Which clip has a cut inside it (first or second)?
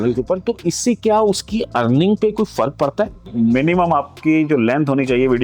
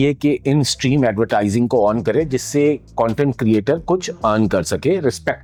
first